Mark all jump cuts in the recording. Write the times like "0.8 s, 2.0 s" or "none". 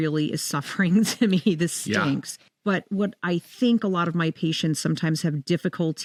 none